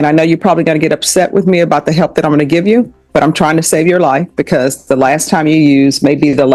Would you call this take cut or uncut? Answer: uncut